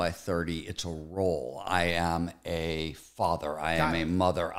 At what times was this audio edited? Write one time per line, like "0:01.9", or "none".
none